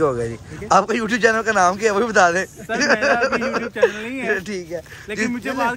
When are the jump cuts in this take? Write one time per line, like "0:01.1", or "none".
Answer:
0:02.6